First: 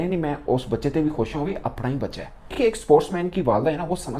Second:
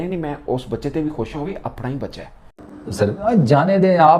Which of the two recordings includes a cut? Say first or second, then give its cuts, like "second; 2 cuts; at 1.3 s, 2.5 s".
second; 1 cut; at 2.5 s